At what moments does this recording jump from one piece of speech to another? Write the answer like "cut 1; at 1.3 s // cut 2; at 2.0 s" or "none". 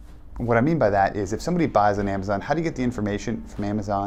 none